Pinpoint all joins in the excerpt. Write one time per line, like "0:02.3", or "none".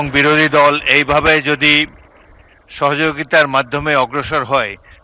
none